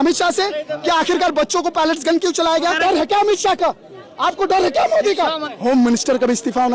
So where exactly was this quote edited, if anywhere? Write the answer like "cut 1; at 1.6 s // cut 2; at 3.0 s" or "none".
cut 1; at 2.8 s // cut 2; at 5.5 s